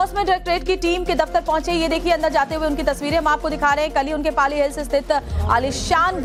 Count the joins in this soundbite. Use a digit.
0